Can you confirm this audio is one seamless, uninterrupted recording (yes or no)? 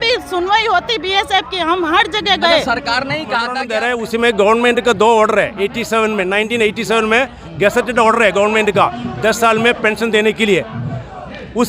no